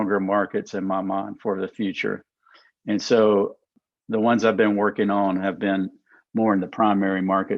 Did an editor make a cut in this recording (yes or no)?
yes